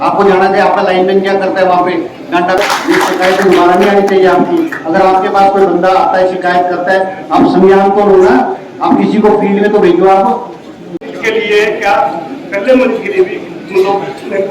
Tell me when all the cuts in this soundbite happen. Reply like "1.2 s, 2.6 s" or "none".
2.6 s, 11.1 s